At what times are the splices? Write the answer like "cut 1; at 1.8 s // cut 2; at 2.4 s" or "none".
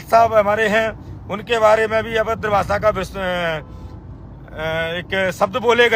none